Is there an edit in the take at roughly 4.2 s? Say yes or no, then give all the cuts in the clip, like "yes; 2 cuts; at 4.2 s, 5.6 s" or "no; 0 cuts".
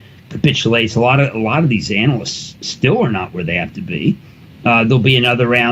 yes; 1 cut; at 4.2 s